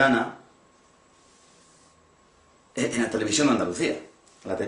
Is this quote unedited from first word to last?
yes; 0 cuts

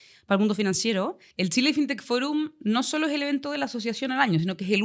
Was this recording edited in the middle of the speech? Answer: yes; 1 cut; at 1.2 s

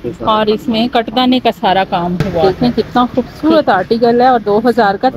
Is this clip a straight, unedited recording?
no; 1 cut; at 2.4 s

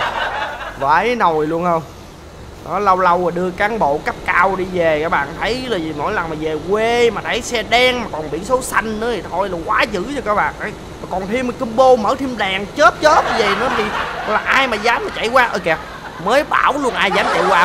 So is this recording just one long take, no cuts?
yes; 0 cuts

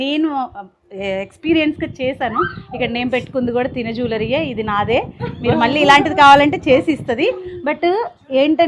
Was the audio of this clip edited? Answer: no; 0 cuts

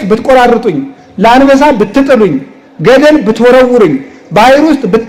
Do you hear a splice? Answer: no; 0 cuts

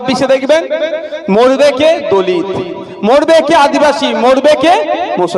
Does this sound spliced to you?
no; 0 cuts

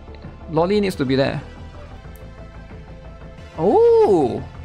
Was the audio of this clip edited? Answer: yes; 1 cut; at 2.0 s

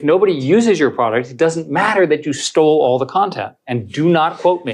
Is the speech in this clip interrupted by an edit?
no; 0 cuts

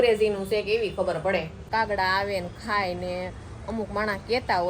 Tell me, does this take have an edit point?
yes; 1 cut; at 1.7 s

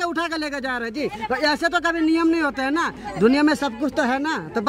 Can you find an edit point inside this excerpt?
no; 0 cuts

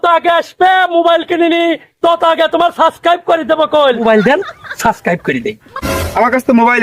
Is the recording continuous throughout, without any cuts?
no; 2 cuts; at 4.0 s, 5.7 s

